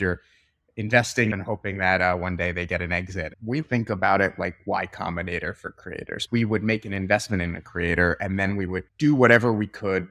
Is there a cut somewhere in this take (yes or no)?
yes